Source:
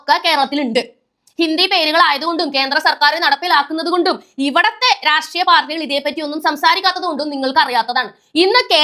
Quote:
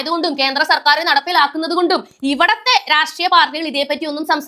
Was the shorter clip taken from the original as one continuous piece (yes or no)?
yes